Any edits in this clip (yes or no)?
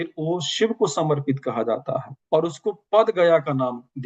no